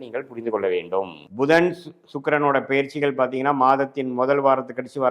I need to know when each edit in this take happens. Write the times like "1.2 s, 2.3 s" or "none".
1.2 s